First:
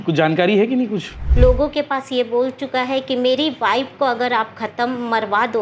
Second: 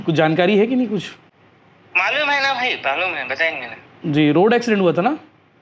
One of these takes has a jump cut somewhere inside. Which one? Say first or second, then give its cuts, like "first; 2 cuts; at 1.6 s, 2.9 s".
first; 1 cut; at 1.2 s